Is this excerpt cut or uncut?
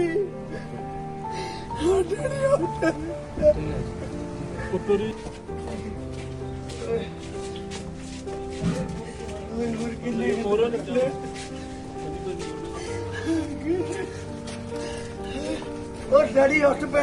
cut